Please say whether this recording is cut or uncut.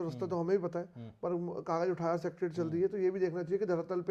uncut